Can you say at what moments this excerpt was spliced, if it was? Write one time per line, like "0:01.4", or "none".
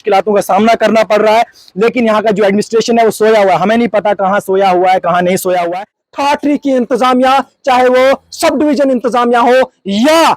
0:06.0